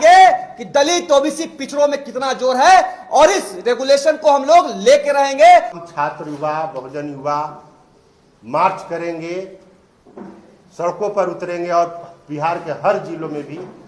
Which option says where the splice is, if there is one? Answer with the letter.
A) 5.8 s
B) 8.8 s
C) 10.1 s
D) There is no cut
A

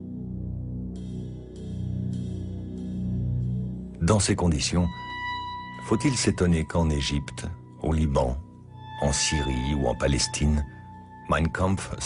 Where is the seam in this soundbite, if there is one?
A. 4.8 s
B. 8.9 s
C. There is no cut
B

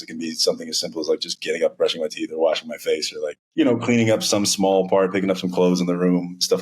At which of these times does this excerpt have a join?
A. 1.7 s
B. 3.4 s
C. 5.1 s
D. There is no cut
B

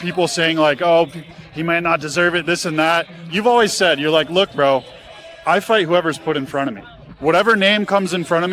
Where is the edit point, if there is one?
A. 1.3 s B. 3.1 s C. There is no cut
A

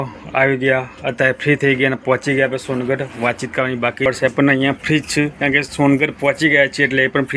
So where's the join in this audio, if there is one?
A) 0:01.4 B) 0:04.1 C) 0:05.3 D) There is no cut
B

